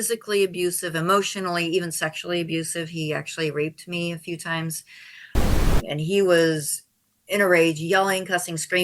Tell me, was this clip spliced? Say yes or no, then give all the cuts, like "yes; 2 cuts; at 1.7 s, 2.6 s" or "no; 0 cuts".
yes; 1 cut; at 5.6 s